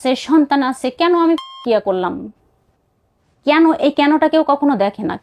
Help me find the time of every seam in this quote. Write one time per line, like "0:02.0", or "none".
0:02.3